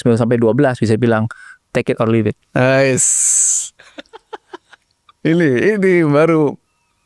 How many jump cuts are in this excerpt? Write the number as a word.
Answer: zero